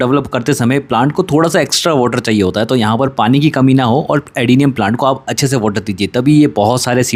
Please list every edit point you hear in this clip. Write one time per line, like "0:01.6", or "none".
none